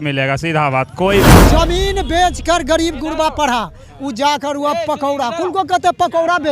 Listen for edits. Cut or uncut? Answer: cut